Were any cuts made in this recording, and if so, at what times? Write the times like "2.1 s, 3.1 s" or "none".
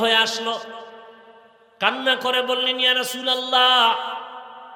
none